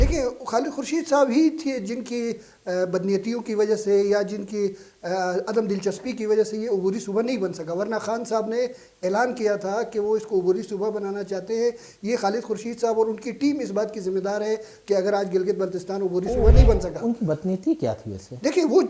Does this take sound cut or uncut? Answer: uncut